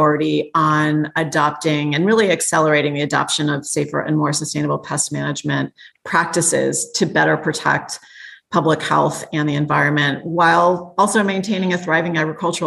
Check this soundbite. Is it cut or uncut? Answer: uncut